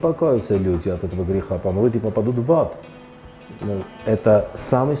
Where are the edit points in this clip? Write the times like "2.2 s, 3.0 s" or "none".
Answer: none